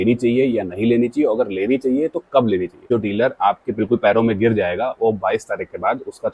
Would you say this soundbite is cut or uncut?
cut